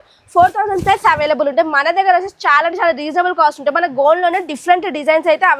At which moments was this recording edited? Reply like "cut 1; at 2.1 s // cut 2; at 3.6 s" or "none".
none